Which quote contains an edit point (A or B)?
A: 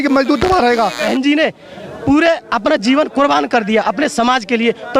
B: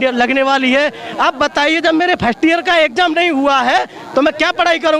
A